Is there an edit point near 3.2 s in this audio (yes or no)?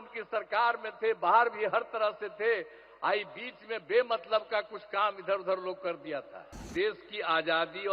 no